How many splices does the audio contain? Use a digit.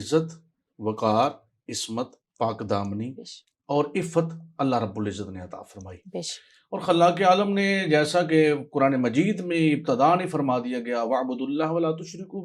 0